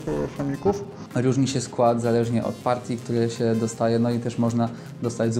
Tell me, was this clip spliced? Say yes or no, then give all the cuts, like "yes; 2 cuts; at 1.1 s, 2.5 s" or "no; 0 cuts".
yes; 1 cut; at 0.9 s